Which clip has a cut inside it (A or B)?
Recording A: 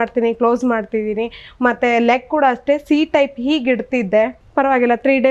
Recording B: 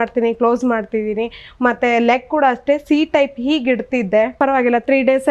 B